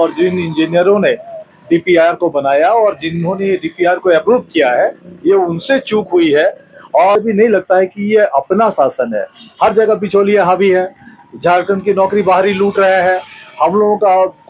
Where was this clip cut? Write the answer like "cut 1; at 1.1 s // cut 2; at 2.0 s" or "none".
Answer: cut 1; at 7.2 s